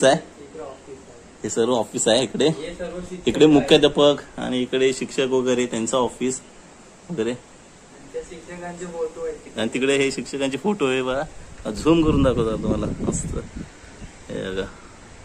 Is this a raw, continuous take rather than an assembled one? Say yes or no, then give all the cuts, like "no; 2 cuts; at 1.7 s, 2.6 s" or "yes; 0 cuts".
yes; 0 cuts